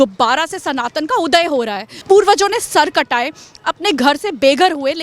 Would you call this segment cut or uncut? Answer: cut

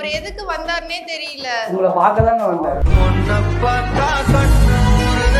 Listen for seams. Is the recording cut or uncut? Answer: uncut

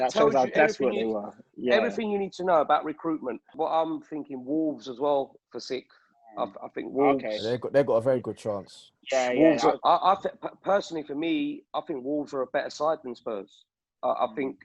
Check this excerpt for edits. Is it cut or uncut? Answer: cut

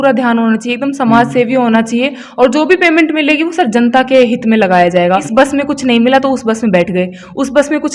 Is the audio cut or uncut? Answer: cut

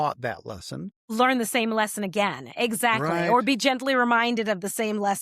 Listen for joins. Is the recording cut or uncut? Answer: cut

